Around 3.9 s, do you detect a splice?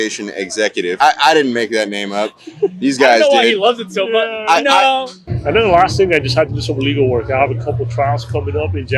no; 1 cut; at 5.1 s

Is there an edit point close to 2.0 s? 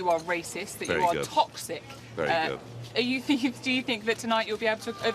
no; 0 cuts

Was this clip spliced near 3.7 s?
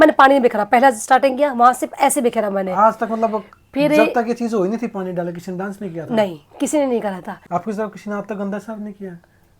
no; 1 cut; at 7.3 s

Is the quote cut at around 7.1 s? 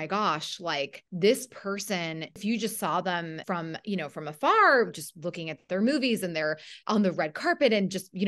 no; 3 cuts; at 1.0 s, 2.3 s, 3.4 s

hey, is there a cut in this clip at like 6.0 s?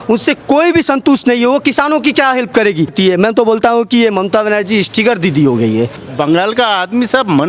yes; 2 cuts; at 2.9 s, 6.0 s

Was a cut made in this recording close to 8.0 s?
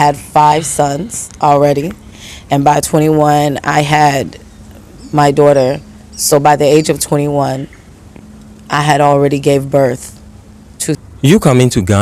no; 1 cut; at 11.0 s

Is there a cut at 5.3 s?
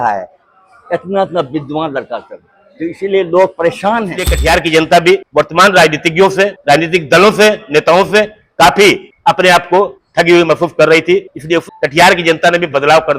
yes; 6 cuts; at 4.3 s, 5.3 s, 6.6 s, 9.1 s, 10.0 s, 11.6 s

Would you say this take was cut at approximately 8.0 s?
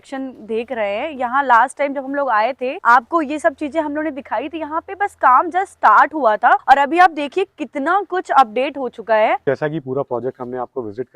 no; 3 cuts; at 2.7 s, 6.6 s, 9.4 s

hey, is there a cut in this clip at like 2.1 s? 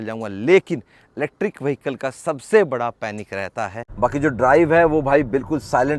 no; 1 cut; at 3.8 s

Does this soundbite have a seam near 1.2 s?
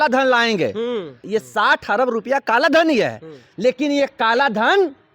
yes; 1 cut; at 1.2 s

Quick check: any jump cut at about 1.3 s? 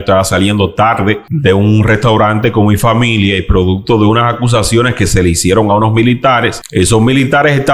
yes; 2 cuts; at 1.3 s, 6.6 s

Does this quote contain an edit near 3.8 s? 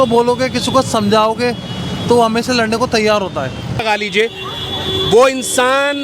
yes; 1 cut; at 3.8 s

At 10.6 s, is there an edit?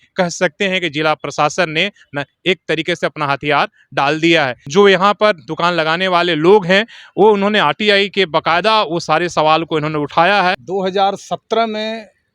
yes; 2 cuts; at 4.6 s, 10.6 s

